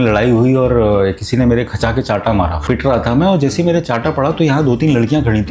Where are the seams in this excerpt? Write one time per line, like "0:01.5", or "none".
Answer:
0:02.6